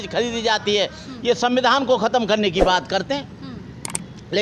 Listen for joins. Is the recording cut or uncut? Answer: cut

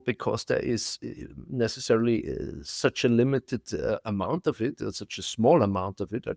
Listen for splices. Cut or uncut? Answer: uncut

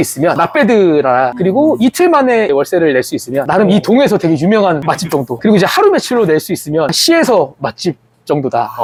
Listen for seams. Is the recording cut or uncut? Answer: uncut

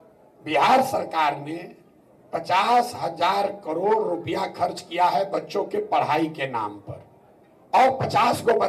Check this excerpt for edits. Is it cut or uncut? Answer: uncut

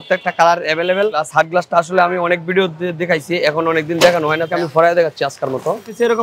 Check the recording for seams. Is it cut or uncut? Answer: cut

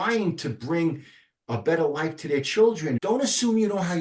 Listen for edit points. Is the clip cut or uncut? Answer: cut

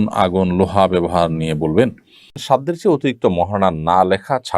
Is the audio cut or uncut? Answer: cut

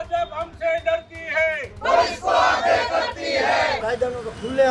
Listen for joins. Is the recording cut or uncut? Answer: cut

